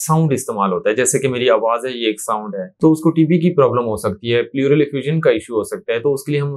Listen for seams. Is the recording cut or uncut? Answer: cut